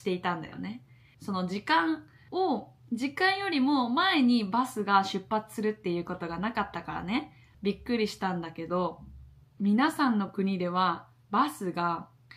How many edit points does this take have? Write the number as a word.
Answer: one